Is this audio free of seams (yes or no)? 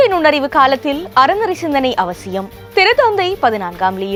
yes